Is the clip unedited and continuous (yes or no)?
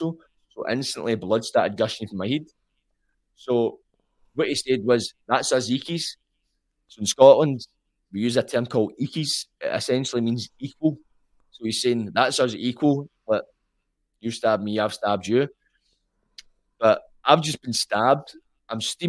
yes